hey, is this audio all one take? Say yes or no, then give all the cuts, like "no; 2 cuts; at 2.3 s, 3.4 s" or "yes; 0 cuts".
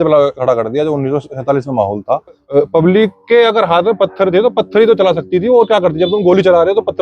no; 1 cut; at 2.4 s